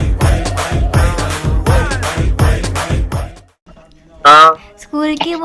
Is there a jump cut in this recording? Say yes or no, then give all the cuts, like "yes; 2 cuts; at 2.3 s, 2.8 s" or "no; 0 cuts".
yes; 1 cut; at 3.6 s